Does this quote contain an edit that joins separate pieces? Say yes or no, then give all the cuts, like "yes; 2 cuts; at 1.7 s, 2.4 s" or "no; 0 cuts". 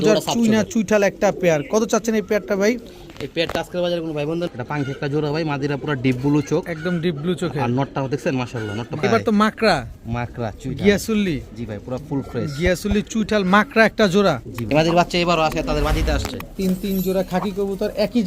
yes; 3 cuts; at 4.5 s, 9.0 s, 14.6 s